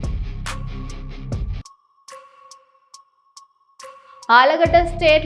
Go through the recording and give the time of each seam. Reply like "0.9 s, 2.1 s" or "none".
1.3 s